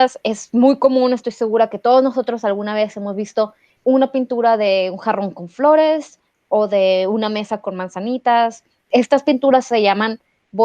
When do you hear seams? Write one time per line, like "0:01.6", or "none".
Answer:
0:03.6
0:08.7